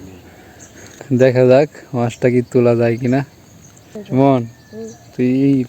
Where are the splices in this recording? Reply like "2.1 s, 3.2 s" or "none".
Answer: 1.0 s, 3.9 s